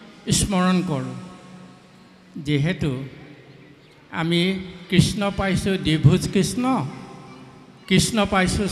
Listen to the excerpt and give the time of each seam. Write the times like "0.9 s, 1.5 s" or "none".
none